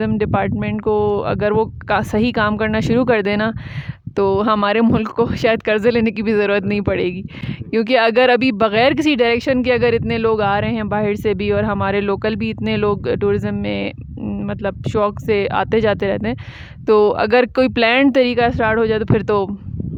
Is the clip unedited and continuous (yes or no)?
yes